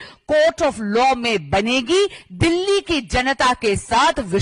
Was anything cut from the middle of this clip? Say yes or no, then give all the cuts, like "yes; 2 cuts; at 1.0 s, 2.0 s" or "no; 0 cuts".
no; 0 cuts